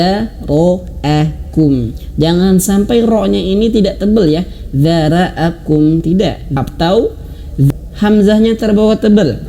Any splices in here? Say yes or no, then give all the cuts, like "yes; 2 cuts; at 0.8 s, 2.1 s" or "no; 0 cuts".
yes; 2 cuts; at 6.4 s, 7.7 s